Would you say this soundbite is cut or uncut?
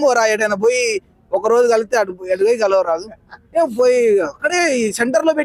uncut